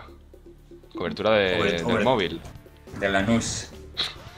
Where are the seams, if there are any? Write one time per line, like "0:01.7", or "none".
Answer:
none